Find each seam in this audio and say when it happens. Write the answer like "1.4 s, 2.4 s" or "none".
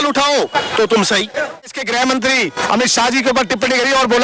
1.7 s